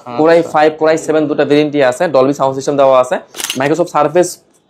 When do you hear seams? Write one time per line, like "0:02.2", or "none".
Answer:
0:03.4